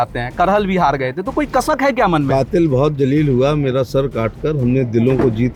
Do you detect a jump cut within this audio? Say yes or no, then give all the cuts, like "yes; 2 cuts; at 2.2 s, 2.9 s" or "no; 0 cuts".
no; 0 cuts